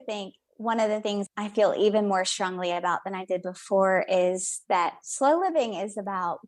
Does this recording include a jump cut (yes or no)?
yes